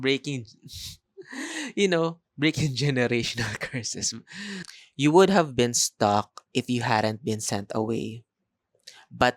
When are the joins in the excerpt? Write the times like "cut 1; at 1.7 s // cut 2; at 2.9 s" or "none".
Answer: cut 1; at 4.8 s